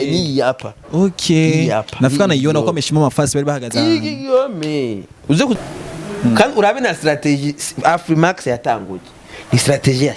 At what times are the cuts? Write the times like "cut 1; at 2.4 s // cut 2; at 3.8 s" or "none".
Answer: cut 1; at 5.6 s